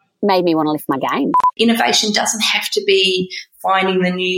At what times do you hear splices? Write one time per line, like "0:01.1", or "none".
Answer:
0:01.4